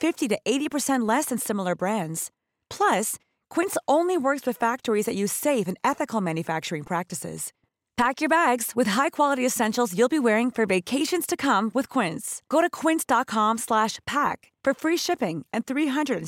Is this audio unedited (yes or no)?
yes